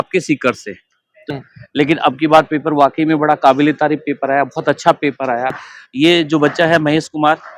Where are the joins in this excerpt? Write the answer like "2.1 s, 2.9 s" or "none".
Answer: 1.3 s, 5.6 s